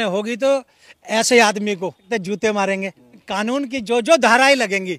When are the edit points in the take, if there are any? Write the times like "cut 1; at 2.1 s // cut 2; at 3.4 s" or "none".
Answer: cut 1; at 2.0 s // cut 2; at 3.2 s